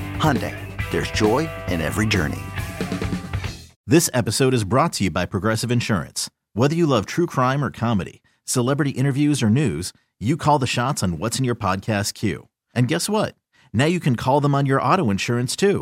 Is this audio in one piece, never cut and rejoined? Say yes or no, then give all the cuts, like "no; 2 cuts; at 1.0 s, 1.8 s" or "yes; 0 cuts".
no; 1 cut; at 3.7 s